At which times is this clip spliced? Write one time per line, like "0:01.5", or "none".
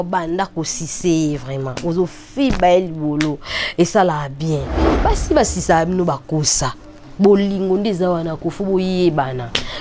0:04.9